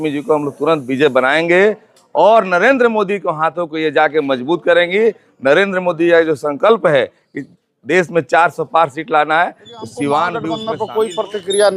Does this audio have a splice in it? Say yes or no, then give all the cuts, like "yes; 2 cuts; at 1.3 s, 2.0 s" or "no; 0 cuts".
yes; 1 cut; at 10.6 s